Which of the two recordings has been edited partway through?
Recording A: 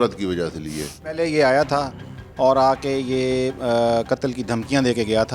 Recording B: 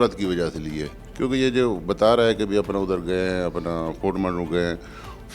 A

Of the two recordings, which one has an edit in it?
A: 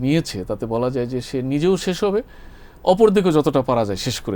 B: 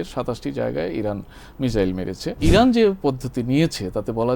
B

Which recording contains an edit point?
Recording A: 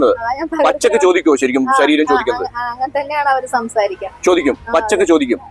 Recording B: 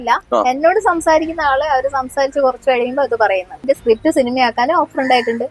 B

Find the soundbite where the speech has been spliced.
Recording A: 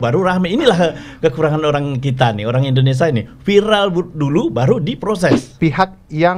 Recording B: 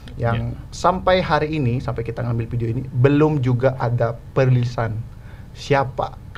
A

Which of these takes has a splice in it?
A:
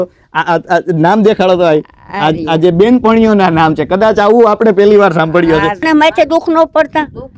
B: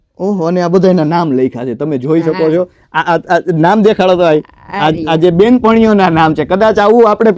A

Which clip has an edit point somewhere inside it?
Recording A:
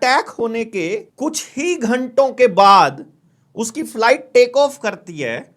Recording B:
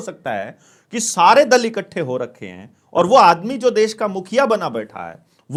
A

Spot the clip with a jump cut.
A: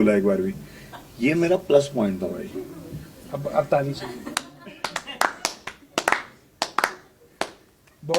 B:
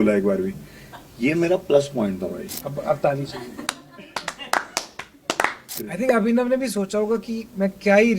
B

